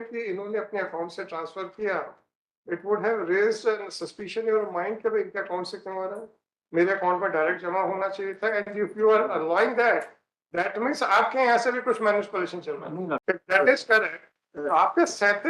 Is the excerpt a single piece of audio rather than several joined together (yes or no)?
no